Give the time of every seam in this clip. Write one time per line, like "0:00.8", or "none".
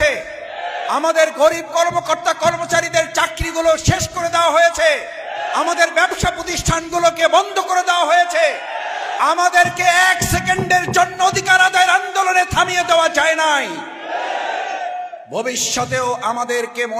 none